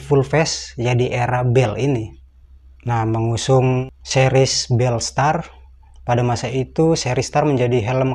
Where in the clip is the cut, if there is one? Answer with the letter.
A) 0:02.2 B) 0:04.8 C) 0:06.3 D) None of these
D